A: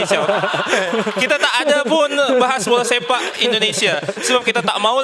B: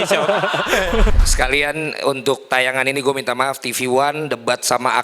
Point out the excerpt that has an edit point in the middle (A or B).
B